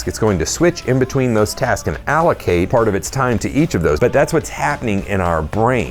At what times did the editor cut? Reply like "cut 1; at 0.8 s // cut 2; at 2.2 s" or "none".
cut 1; at 2.7 s // cut 2; at 4.0 s